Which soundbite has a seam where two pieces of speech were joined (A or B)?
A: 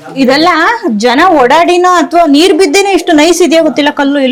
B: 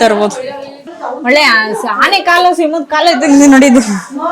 B